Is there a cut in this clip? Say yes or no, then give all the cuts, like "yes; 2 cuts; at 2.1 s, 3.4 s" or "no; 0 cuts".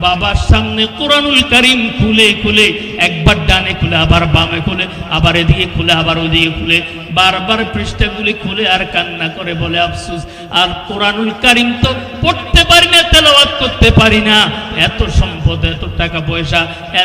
no; 0 cuts